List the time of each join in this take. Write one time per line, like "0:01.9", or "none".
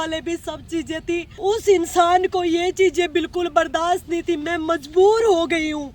0:01.3